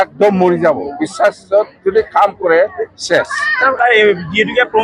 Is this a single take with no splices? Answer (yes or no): no